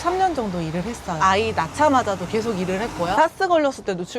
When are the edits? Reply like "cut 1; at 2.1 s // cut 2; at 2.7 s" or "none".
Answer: cut 1; at 1.2 s